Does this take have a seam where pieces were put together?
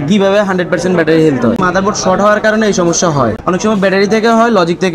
yes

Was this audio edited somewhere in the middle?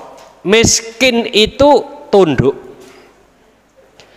no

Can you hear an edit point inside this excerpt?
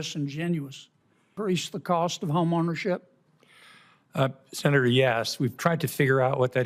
yes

